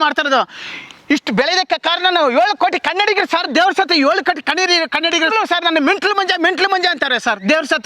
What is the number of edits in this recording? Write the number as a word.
one